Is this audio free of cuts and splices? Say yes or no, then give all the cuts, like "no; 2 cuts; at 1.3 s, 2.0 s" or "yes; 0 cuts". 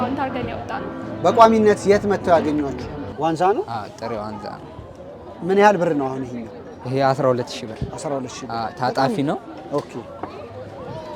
no; 1 cut; at 3.1 s